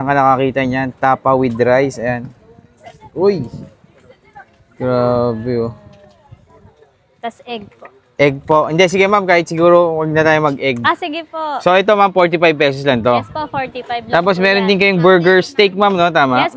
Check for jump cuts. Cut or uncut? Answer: uncut